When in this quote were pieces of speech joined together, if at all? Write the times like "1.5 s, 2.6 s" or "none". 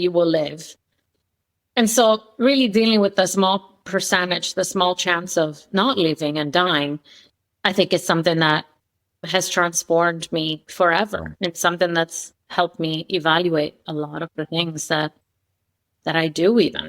9.2 s, 15.9 s